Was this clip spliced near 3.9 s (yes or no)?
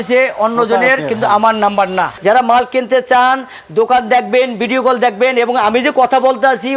no